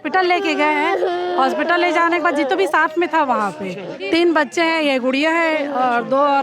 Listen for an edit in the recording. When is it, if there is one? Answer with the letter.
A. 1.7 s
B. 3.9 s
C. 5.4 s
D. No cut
B